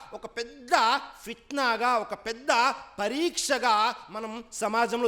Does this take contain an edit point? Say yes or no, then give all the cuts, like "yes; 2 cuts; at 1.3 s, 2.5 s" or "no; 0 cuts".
no; 0 cuts